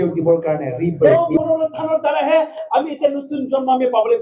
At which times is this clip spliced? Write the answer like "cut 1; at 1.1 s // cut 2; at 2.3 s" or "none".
cut 1; at 1.1 s